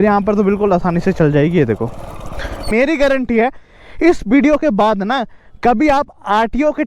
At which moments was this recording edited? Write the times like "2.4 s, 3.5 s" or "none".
2.7 s